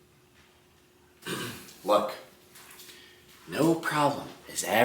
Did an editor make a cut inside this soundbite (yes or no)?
yes